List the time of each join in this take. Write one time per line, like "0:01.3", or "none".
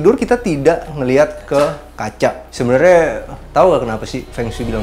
0:02.5